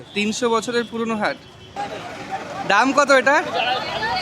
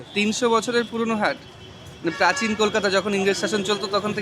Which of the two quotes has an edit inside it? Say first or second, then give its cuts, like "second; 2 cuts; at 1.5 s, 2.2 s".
first; 1 cut; at 1.8 s